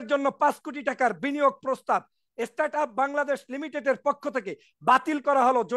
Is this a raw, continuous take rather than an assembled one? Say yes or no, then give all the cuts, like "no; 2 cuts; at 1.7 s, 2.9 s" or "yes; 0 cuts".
yes; 0 cuts